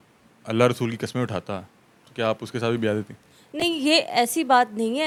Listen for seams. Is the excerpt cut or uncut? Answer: uncut